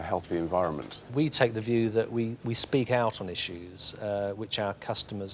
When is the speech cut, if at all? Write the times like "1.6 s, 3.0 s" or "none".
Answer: 0.9 s